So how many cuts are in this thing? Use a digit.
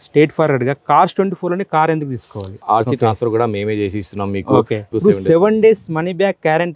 2